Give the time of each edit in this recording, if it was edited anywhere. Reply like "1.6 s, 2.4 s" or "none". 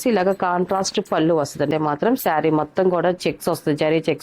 1.7 s